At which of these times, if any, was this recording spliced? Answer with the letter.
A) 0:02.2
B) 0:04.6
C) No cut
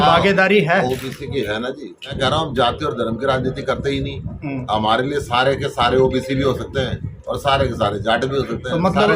A